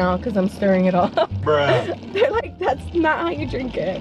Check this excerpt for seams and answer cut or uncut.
uncut